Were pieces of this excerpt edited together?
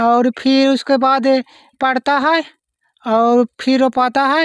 no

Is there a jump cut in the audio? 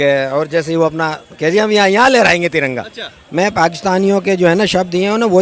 yes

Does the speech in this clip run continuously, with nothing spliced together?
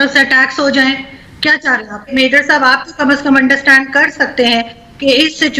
no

